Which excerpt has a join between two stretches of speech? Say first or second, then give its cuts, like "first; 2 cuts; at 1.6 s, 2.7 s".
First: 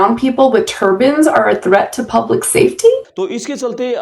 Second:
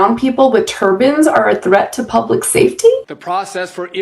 second; 1 cut; at 3.1 s